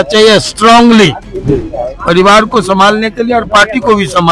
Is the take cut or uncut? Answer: uncut